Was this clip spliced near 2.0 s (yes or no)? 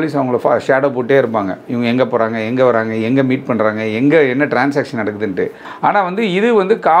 no